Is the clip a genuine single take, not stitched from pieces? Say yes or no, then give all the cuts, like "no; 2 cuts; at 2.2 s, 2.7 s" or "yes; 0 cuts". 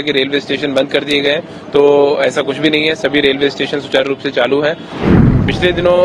no; 1 cut; at 5.0 s